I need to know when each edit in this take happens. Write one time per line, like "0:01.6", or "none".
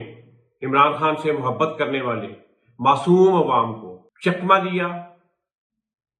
none